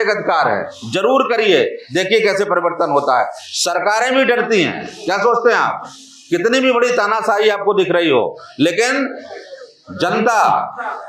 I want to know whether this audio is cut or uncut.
uncut